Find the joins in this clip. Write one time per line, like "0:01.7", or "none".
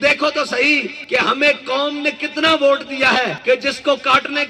0:00.9
0:03.4